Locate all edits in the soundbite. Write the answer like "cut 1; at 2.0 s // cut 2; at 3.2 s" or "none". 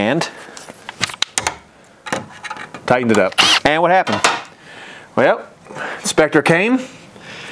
cut 1; at 3.5 s